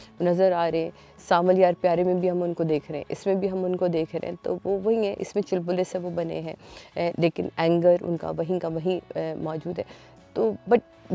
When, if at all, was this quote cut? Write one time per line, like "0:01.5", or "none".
none